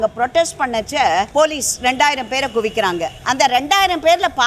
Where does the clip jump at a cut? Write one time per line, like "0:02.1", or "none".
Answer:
0:01.3
0:03.2